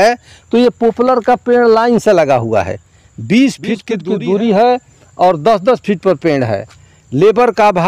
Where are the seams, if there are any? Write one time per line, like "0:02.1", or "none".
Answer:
0:03.9